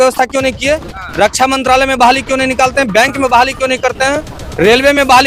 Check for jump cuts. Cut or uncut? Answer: uncut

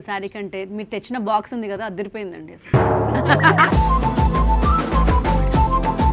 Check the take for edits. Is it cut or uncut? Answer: uncut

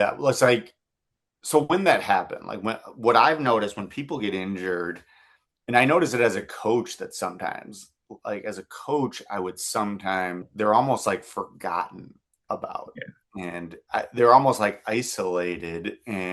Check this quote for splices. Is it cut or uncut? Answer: uncut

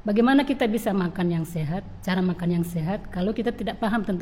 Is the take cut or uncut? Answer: uncut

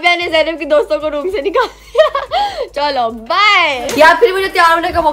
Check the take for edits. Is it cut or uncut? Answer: uncut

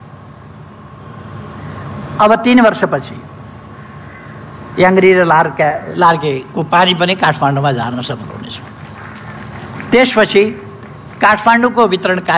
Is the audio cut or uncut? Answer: uncut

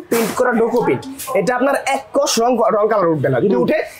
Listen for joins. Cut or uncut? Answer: uncut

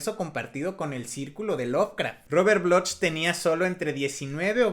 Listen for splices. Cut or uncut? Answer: cut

